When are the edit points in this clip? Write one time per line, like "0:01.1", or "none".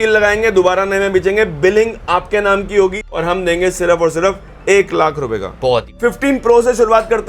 0:03.0
0:05.9